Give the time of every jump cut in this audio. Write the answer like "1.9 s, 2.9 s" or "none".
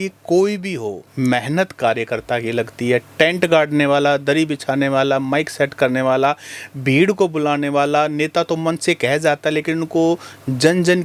none